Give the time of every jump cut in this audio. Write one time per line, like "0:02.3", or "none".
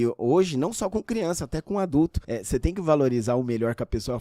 0:02.3